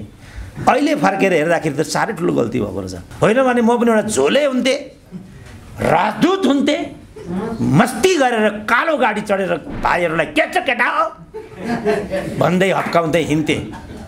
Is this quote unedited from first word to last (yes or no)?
no